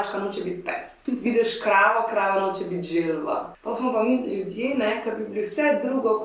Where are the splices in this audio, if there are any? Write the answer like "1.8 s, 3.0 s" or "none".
0.9 s, 3.5 s